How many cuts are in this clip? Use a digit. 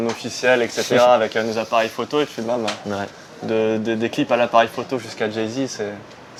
0